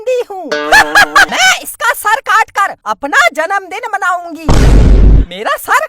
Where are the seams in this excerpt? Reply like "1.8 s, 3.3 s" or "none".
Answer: 1.3 s